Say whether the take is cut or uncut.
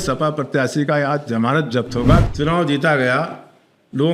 cut